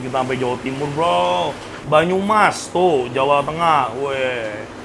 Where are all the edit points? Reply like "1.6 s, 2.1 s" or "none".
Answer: 1.7 s